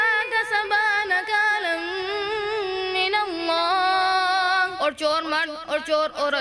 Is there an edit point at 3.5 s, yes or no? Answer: no